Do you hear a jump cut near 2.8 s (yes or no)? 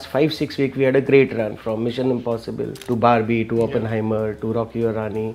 yes